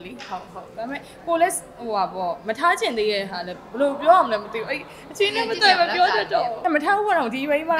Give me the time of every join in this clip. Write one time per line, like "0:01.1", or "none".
0:06.6